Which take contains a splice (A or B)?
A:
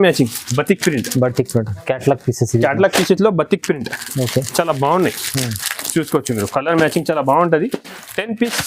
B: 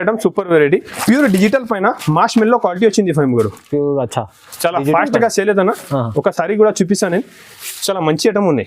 B